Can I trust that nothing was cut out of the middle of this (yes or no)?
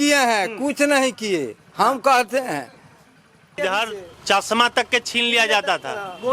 no